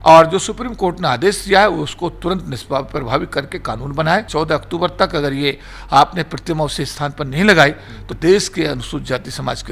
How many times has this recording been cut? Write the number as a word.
two